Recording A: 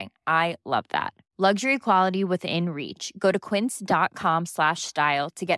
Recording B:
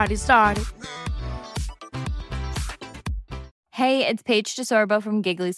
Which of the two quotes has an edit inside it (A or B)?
B